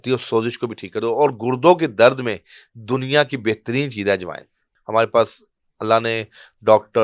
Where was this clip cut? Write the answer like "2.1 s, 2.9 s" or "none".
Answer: 4.7 s